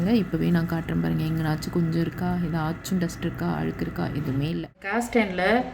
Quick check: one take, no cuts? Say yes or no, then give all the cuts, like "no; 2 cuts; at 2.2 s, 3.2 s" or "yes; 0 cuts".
no; 1 cut; at 4.7 s